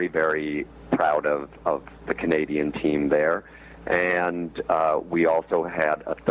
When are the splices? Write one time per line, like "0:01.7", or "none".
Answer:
none